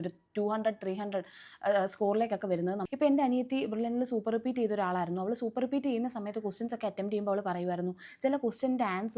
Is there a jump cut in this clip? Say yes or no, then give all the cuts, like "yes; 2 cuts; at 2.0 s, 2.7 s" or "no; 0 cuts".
yes; 1 cut; at 2.8 s